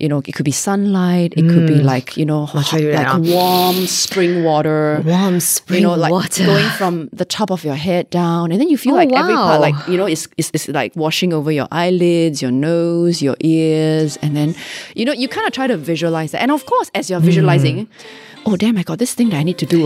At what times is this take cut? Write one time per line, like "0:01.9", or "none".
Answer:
none